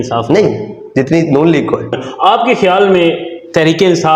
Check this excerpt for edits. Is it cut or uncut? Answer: cut